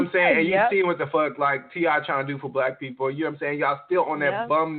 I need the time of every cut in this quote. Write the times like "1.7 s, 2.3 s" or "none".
none